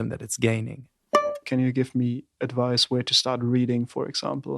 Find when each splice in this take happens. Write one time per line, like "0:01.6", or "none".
0:01.0

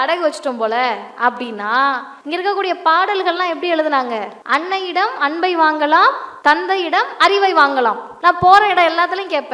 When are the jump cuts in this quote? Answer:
0:02.1
0:04.3
0:06.3
0:08.1

